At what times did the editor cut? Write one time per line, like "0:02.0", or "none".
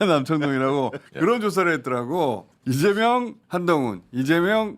0:01.1
0:02.5
0:03.4